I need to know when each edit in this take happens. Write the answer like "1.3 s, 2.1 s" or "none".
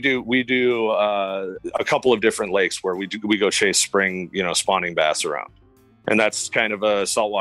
1.6 s, 5.6 s